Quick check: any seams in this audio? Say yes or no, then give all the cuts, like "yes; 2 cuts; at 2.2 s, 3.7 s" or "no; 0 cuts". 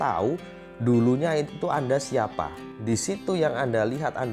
yes; 1 cut; at 2.8 s